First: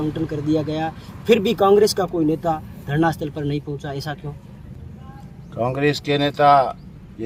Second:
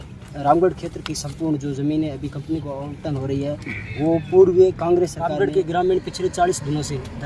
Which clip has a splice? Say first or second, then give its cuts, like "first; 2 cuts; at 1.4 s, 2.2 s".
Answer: second; 1 cut; at 5.4 s